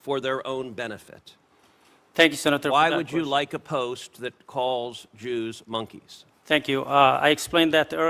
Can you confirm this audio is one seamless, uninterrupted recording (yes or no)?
yes